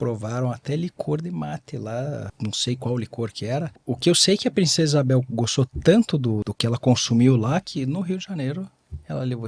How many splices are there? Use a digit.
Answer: 3